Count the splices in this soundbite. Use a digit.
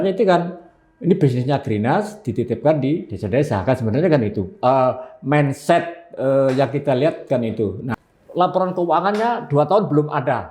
1